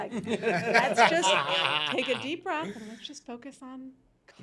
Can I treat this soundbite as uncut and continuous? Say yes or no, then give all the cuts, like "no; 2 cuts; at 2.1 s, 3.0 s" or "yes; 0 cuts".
yes; 0 cuts